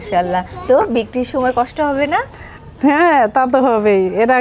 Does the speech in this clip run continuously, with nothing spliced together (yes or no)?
yes